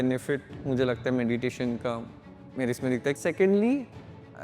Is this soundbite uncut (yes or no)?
no